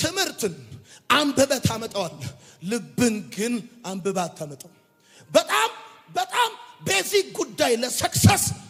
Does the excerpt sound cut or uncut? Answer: uncut